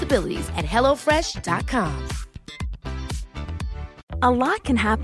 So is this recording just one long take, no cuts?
no; 1 cut; at 4.0 s

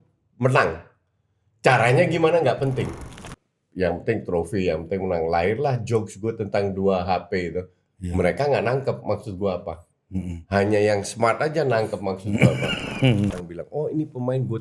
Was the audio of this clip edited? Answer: yes; 2 cuts; at 3.2 s, 13.4 s

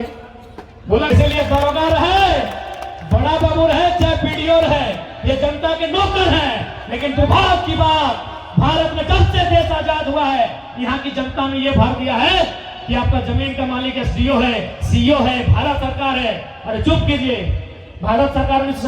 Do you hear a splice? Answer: yes; 1 cut; at 1.1 s

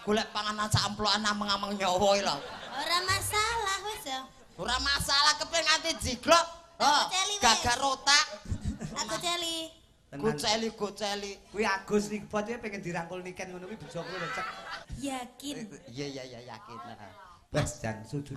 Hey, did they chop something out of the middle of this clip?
yes; 1 cut; at 14.9 s

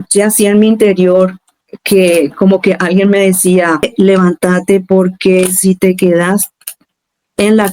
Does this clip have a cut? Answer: yes; 1 cut; at 3.9 s

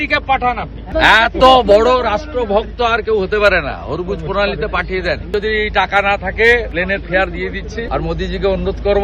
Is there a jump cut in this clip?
yes; 4 cuts; at 0.9 s, 5.3 s, 6.7 s, 7.9 s

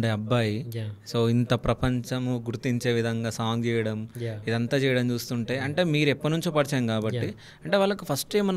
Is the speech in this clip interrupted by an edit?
no; 0 cuts

